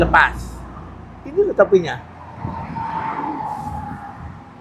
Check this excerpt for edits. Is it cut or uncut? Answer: uncut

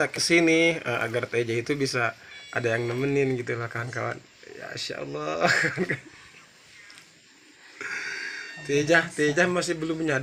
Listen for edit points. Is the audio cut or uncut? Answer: uncut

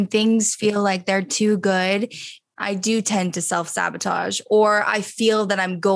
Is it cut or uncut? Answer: cut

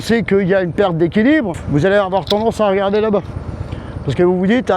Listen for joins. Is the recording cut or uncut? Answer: cut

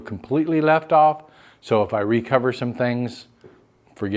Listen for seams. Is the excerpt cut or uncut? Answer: uncut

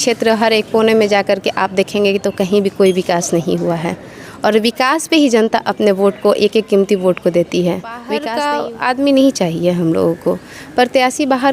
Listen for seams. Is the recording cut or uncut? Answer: cut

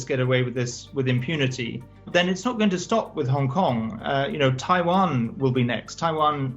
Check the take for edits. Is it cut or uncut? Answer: cut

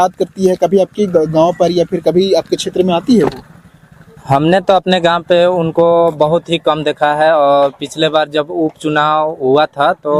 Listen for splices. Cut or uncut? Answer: uncut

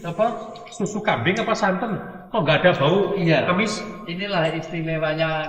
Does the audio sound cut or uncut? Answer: uncut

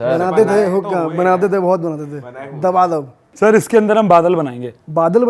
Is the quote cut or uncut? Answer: cut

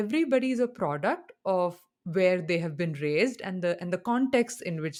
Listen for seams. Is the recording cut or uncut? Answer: uncut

